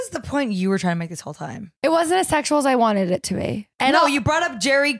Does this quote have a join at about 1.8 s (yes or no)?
yes